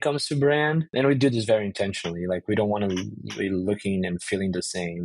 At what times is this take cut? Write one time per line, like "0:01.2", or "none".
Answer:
0:00.9

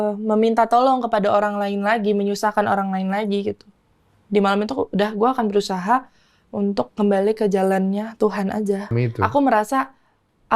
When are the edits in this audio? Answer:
0:08.9

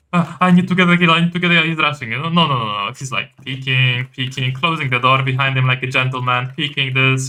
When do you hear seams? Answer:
none

